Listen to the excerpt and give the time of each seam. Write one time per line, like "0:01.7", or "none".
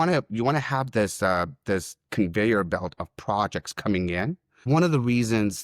0:04.5